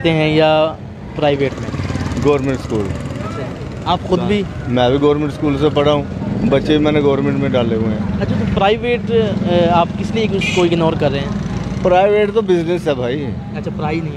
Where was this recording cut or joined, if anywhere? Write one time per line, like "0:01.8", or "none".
none